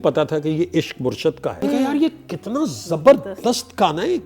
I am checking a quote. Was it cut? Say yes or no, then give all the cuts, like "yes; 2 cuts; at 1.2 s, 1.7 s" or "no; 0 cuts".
yes; 1 cut; at 1.6 s